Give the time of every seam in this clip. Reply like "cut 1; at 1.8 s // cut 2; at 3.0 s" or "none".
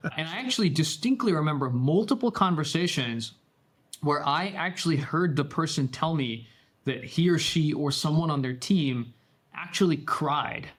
none